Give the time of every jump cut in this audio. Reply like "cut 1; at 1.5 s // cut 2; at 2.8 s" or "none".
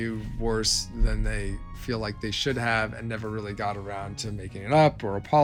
none